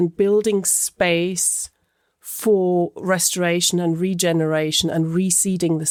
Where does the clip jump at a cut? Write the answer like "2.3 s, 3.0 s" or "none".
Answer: none